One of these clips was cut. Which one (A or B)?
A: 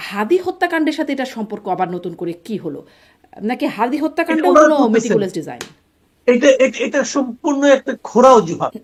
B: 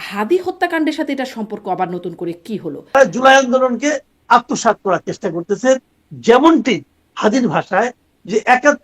B